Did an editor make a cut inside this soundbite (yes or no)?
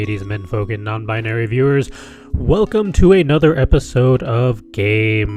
no